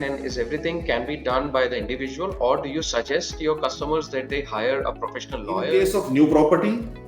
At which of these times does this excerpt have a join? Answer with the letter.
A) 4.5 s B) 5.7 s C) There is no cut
B